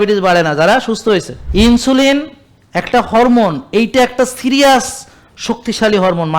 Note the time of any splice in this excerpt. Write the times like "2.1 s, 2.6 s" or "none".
1.4 s